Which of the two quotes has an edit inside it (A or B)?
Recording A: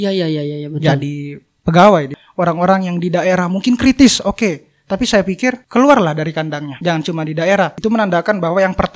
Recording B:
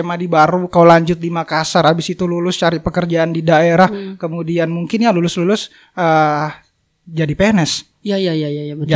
A